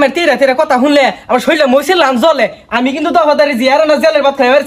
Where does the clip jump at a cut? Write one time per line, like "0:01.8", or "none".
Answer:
none